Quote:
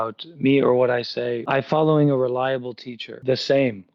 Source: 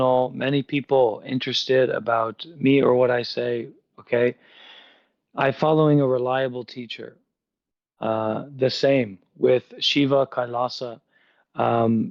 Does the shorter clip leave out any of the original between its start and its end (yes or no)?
yes